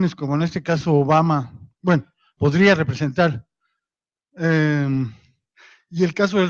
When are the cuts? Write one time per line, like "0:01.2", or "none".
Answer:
none

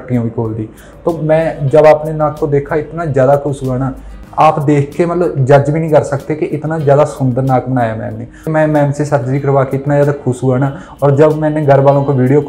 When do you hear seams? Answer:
0:04.1
0:08.4

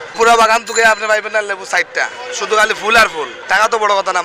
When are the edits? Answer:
none

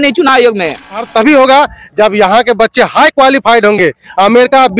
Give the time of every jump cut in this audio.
0:01.1

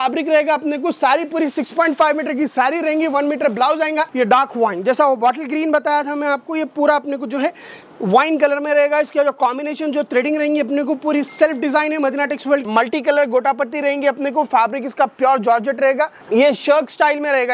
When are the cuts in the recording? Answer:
0:04.1
0:12.6
0:16.2

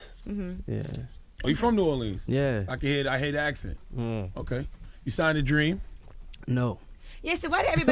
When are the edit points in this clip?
0:03.1

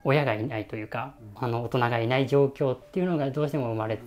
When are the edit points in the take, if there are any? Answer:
0:01.2

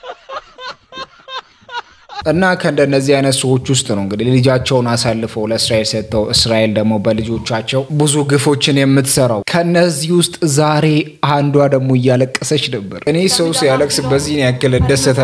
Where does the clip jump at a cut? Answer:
none

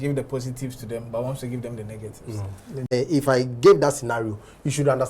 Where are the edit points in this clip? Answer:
0:02.9

